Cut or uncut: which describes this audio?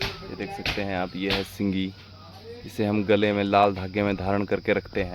uncut